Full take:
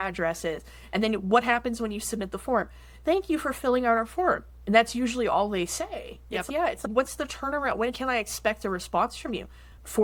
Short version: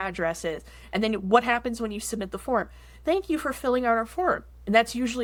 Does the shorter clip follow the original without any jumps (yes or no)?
yes